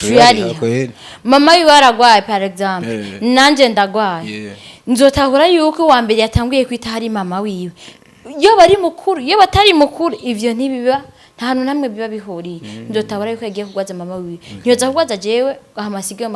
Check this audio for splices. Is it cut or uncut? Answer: uncut